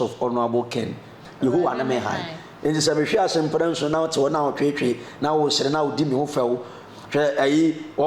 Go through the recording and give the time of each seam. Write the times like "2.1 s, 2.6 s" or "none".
1.2 s